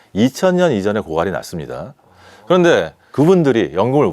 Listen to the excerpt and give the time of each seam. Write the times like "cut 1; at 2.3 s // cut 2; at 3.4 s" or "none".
cut 1; at 3.0 s